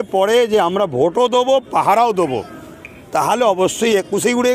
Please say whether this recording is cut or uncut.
uncut